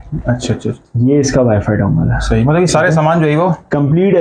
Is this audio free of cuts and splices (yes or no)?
yes